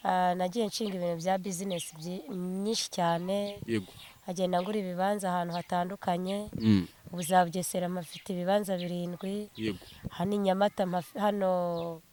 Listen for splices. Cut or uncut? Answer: uncut